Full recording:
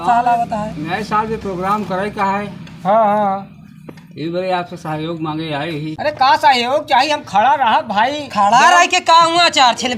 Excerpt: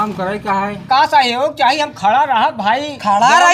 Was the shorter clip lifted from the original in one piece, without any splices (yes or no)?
no